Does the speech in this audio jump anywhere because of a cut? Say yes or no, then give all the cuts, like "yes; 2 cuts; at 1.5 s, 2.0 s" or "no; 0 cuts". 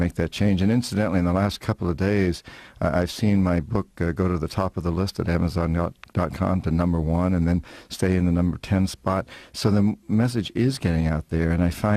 no; 0 cuts